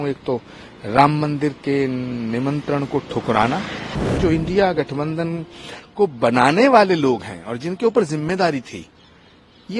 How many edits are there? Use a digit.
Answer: 1